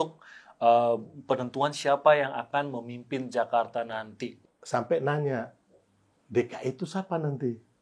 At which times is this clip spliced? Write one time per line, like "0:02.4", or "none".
0:04.3